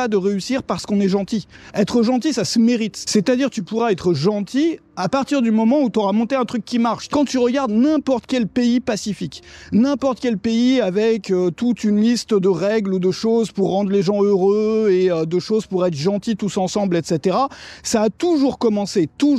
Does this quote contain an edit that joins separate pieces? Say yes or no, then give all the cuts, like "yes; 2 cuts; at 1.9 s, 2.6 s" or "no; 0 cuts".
yes; 2 cuts; at 1.6 s, 7.1 s